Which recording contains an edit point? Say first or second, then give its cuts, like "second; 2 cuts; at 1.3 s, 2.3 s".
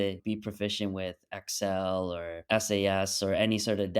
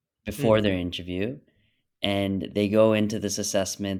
first; 1 cut; at 2.4 s